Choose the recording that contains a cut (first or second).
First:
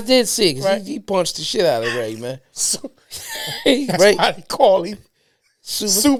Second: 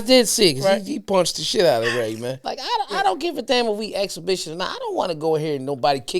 second